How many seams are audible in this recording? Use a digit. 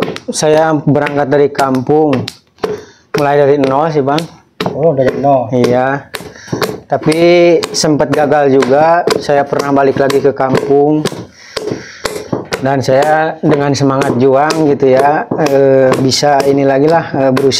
0